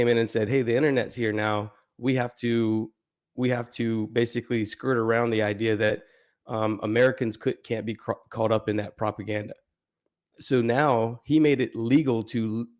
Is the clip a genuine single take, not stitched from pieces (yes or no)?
yes